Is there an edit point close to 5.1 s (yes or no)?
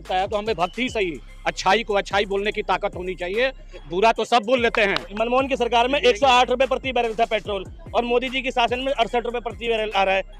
yes